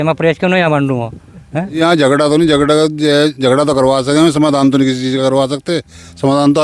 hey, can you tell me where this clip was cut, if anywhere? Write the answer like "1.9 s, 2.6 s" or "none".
1.8 s